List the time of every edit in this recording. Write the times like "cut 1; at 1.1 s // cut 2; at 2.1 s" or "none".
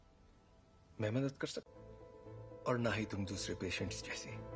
none

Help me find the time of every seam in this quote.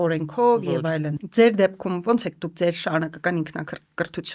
cut 1; at 1.2 s

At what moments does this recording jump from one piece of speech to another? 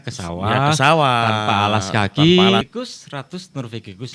cut 1; at 2.6 s

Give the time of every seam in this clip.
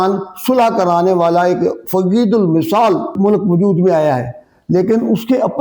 cut 1; at 3.1 s

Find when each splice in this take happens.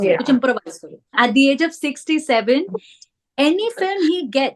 cut 1; at 1.2 s

